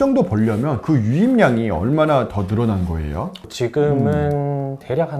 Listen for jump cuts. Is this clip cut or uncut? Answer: uncut